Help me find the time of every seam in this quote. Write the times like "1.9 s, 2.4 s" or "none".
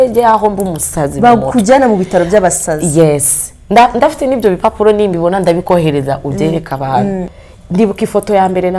7.3 s